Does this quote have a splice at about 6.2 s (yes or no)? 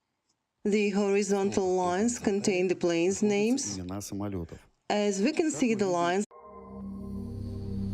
no